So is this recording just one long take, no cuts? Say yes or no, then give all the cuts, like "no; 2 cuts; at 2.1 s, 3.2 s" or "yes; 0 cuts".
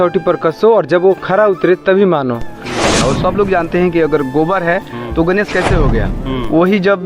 no; 1 cut; at 2.9 s